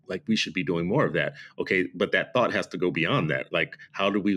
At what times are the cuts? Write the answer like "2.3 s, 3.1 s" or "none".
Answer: none